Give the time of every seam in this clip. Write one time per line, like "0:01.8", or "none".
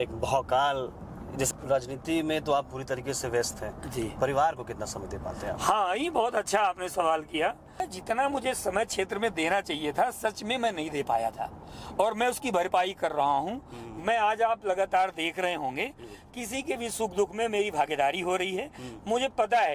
0:01.5
0:07.8